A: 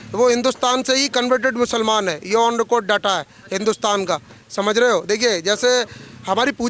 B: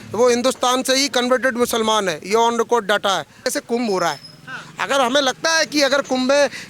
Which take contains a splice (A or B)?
B